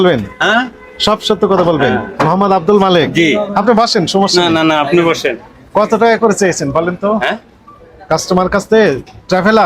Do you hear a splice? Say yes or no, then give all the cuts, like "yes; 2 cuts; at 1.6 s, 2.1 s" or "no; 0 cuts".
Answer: no; 0 cuts